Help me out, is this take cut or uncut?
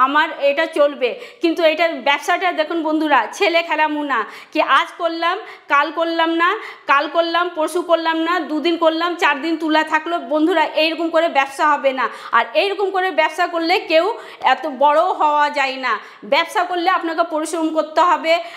uncut